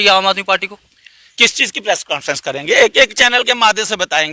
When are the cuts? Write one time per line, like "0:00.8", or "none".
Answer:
none